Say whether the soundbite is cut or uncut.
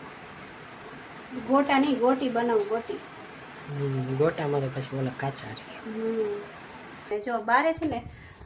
cut